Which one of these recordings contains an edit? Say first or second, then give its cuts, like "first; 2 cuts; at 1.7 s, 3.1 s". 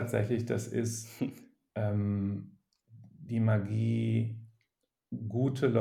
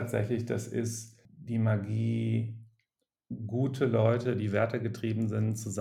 second; 1 cut; at 1.0 s